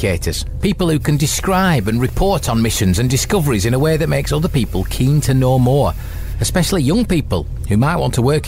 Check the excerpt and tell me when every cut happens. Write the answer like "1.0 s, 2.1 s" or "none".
none